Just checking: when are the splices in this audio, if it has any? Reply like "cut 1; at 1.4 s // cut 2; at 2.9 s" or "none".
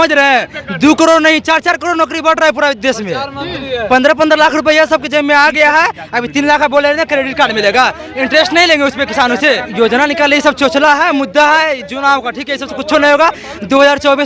cut 1; at 9.7 s